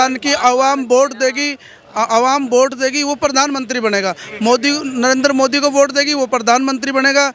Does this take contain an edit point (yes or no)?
no